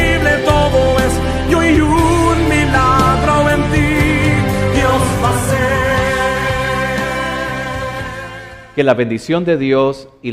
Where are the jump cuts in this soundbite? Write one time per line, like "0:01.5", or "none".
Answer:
0:07.8

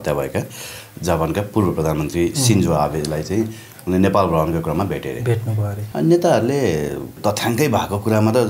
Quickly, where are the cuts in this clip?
0:05.7
0:07.1

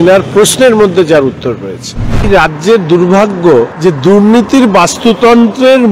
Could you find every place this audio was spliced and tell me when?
0:02.2
0:03.7

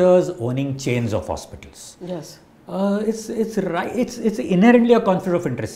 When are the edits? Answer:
none

